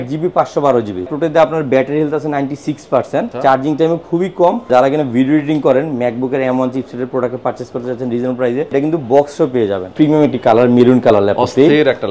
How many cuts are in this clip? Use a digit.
5